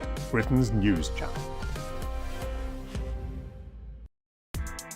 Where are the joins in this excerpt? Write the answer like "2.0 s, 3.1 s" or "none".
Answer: 4.0 s